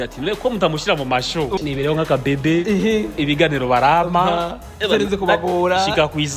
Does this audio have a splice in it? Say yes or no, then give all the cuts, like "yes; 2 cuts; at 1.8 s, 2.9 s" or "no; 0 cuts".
yes; 1 cut; at 1.6 s